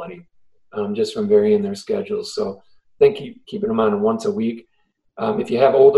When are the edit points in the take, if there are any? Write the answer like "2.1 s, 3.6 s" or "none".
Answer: none

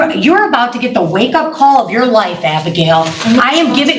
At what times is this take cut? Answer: none

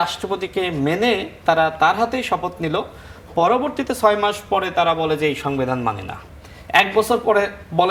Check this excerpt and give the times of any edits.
none

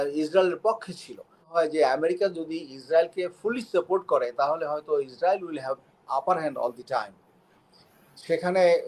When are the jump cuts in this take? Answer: 1.5 s

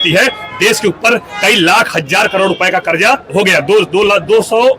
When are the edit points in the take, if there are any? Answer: 3.2 s

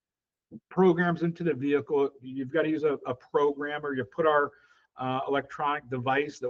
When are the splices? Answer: none

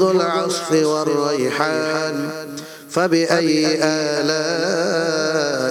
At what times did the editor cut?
none

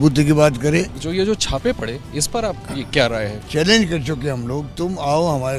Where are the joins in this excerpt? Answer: 1.0 s, 3.4 s

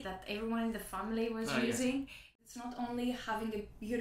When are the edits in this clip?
2.2 s

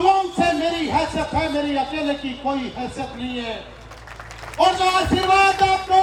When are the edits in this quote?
none

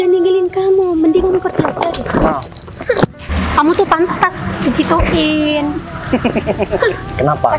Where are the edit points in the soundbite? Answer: 3.2 s

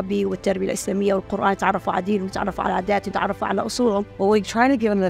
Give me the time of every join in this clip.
4.1 s

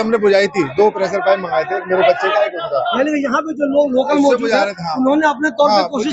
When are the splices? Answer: none

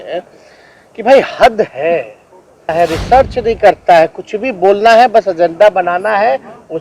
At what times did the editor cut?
2.7 s

